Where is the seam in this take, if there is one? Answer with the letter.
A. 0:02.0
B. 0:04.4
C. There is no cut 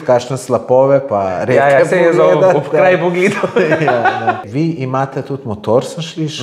B